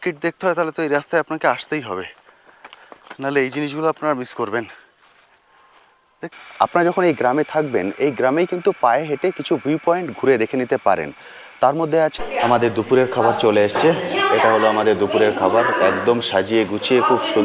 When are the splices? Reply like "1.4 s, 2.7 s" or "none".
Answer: 6.3 s, 12.1 s